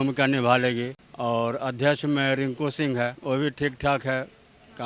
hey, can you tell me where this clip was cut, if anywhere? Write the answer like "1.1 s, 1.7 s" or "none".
1.0 s, 3.2 s